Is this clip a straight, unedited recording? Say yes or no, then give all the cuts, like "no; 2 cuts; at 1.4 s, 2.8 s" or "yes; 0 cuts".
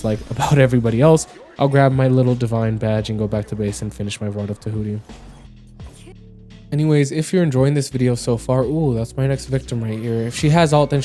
yes; 0 cuts